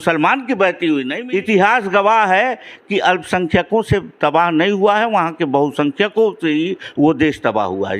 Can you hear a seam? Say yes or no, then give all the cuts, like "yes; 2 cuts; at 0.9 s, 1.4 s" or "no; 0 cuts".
yes; 1 cut; at 1.2 s